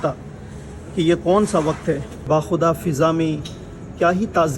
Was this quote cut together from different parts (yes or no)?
yes